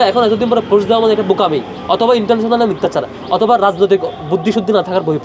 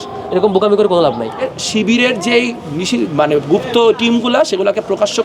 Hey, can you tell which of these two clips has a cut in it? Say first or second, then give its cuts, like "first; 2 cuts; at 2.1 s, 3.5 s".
second; 1 cut; at 1.5 s